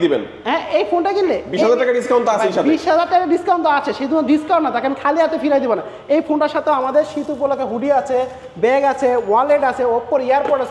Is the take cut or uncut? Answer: uncut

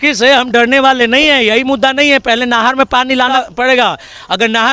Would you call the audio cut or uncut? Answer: cut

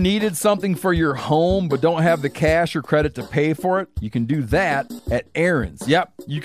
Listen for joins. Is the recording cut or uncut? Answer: cut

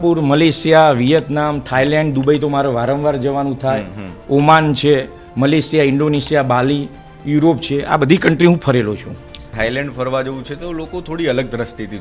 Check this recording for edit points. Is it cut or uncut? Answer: cut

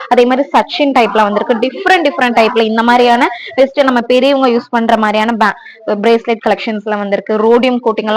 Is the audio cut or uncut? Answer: uncut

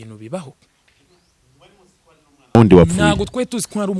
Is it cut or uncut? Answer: uncut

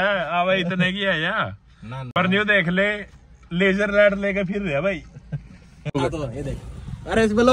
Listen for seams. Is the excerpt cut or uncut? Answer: cut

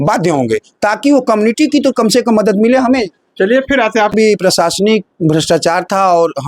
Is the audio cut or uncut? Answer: cut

